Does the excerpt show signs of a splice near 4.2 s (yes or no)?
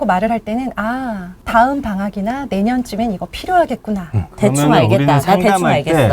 yes